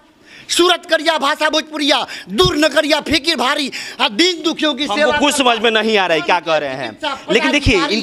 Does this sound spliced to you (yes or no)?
no